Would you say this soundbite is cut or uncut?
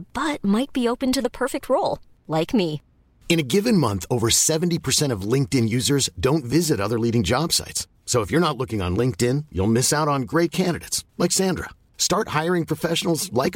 uncut